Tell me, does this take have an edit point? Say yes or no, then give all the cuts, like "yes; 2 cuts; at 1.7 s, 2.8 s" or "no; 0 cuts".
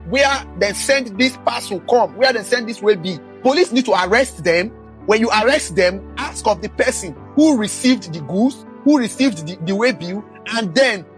no; 0 cuts